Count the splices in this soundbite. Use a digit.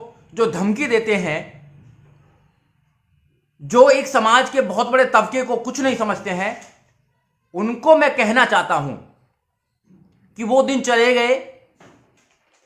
0